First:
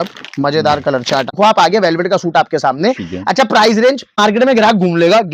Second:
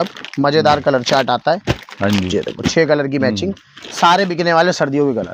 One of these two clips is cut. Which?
first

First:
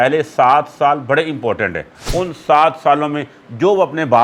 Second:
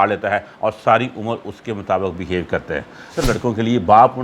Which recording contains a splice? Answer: second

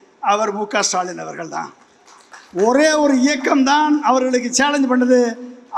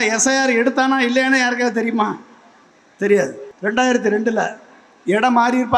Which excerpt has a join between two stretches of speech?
second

